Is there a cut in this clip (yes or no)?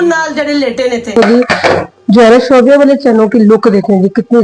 yes